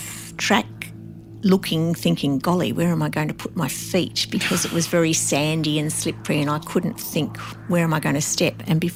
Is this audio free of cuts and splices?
yes; 0 cuts

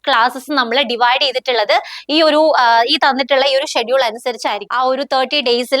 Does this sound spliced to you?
yes; 1 cut; at 4.6 s

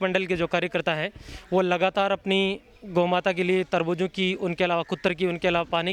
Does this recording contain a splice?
no; 0 cuts

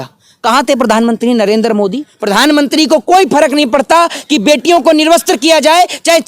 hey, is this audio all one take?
no; 1 cut; at 2.1 s

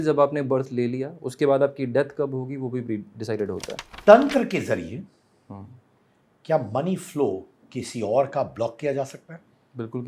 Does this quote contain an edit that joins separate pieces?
yes; 1 cut; at 3.8 s

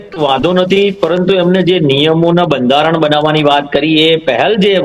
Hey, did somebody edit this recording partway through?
no; 0 cuts

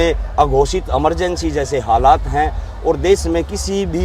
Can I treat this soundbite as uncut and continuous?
yes; 0 cuts

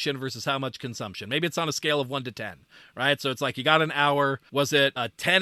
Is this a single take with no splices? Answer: no; 1 cut; at 4.4 s

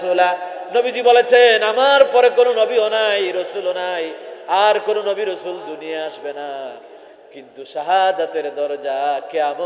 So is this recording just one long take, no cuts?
yes; 0 cuts

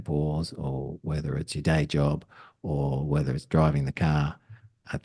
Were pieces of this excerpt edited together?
no; 0 cuts

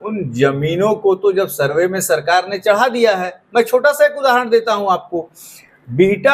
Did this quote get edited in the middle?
no; 0 cuts

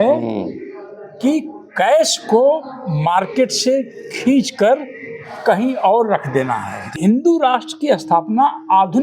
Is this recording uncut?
no; 1 cut; at 6.9 s

